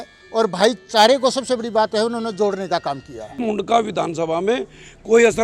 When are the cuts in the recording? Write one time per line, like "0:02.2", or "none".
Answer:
0:03.4